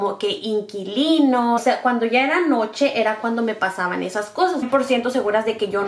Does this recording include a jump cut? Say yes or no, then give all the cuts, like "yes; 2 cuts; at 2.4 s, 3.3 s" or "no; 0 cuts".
yes; 2 cuts; at 1.6 s, 4.7 s